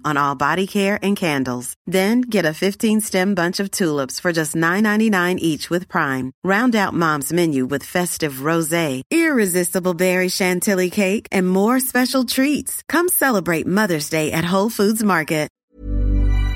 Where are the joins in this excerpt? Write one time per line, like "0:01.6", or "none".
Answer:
0:15.6